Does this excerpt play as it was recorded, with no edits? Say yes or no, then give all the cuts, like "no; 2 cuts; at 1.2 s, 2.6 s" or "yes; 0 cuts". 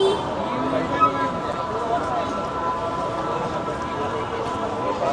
yes; 0 cuts